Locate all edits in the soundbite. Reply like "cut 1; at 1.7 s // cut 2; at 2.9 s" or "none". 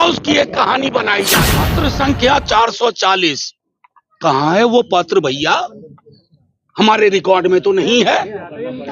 cut 1; at 1.7 s